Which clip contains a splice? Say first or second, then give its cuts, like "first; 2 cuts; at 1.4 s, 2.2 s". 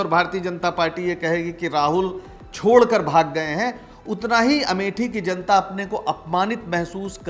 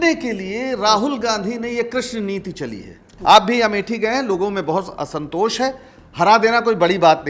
second; 1 cut; at 3.0 s